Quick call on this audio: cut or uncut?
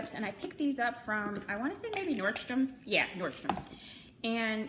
uncut